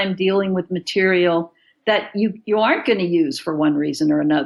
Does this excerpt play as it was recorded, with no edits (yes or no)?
yes